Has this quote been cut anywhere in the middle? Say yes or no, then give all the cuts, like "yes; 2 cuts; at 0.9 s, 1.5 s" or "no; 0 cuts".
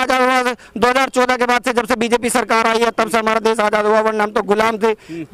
no; 0 cuts